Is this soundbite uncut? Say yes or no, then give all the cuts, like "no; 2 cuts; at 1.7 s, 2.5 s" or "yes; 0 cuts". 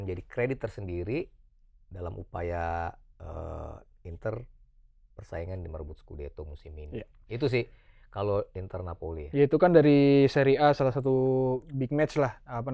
yes; 0 cuts